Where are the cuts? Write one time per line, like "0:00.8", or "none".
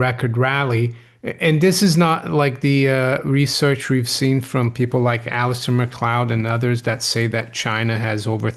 none